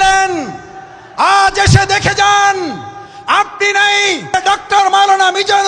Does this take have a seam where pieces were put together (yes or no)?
yes